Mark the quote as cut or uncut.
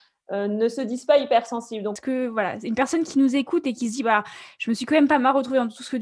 cut